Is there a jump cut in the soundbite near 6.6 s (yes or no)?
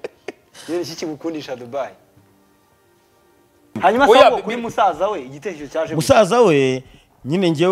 no